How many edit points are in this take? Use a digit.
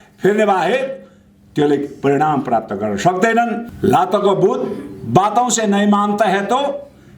1